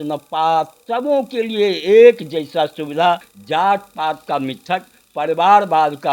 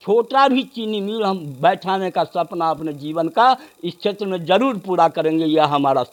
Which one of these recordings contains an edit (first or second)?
first